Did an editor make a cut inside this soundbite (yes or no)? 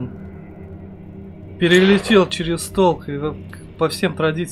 no